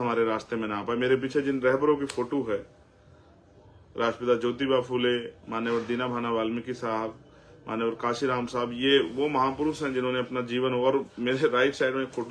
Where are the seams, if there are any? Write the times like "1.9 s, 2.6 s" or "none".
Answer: none